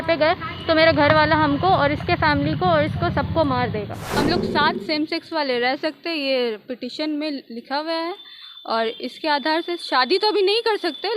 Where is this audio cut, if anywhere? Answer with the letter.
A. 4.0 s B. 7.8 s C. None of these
A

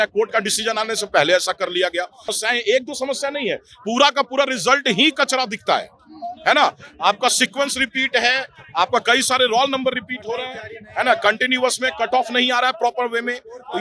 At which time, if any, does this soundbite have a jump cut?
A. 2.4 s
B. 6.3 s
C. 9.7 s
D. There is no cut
A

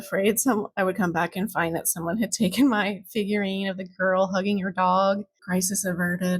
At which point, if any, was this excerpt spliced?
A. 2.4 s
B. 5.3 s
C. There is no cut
B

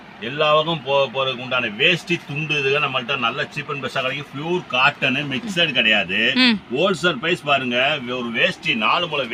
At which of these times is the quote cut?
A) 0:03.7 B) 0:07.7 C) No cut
C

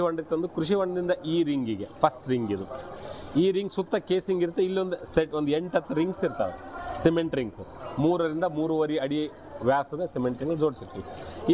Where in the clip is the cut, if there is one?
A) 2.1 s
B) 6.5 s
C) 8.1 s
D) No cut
D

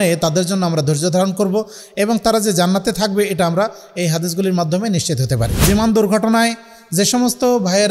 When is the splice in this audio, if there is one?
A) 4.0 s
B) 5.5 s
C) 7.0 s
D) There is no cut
B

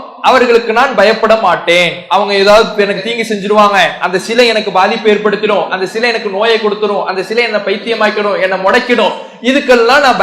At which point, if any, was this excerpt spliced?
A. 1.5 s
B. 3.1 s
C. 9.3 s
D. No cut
D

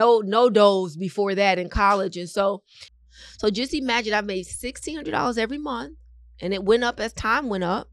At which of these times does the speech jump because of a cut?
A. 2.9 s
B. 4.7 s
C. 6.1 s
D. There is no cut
A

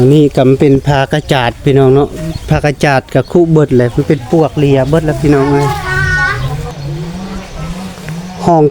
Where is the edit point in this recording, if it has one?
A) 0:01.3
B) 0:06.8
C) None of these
B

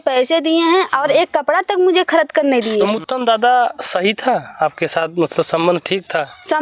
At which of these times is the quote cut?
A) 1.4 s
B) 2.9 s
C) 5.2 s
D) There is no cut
B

